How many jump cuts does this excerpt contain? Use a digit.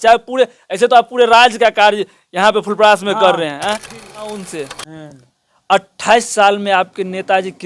1